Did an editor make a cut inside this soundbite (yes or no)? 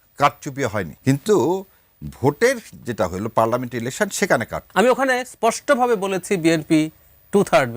yes